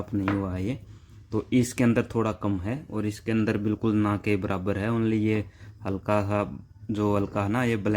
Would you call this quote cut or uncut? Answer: uncut